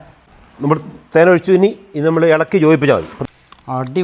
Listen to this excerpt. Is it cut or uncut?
cut